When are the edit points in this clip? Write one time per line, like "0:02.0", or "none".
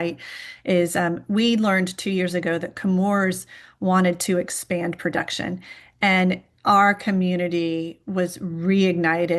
none